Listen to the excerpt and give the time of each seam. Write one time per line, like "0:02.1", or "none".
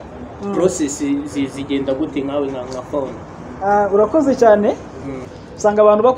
0:05.3